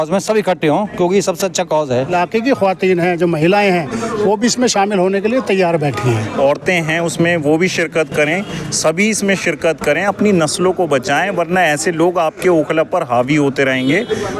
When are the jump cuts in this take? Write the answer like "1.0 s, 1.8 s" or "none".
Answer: 2.1 s, 6.3 s